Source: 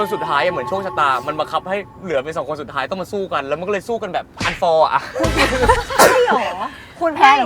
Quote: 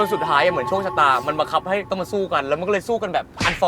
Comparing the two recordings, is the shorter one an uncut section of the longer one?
no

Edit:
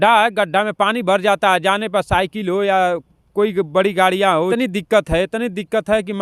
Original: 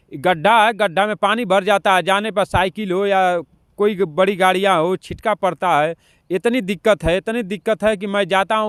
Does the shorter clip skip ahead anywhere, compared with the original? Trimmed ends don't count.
yes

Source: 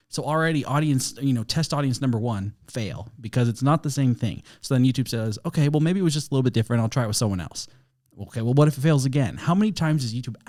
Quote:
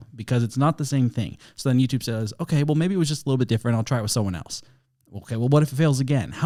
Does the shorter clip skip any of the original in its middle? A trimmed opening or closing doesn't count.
no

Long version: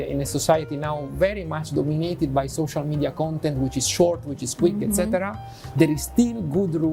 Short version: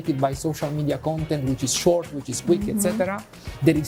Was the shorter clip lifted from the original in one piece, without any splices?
yes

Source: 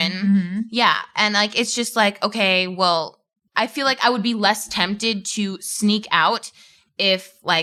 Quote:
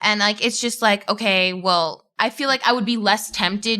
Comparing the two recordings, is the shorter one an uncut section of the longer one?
no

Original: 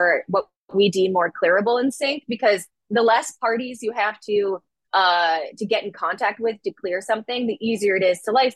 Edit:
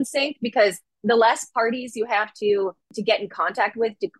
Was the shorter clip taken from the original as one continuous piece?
no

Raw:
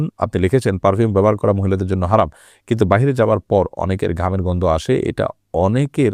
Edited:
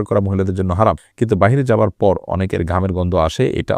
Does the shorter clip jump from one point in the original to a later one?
yes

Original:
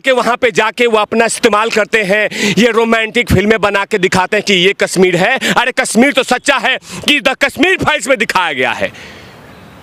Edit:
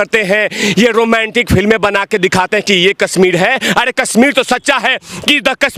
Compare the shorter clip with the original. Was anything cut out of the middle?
no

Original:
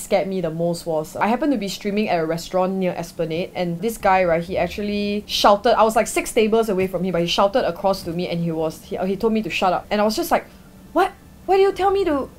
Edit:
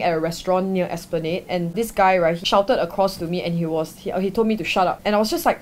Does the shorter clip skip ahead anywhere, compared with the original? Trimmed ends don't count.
yes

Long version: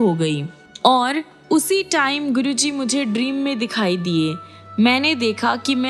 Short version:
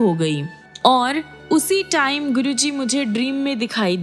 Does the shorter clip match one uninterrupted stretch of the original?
yes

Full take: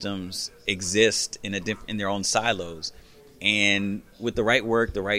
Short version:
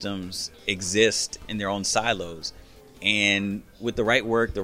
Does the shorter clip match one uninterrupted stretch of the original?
no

